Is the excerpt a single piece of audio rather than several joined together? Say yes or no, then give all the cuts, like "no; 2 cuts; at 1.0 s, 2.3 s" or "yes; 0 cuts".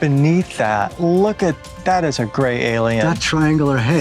yes; 0 cuts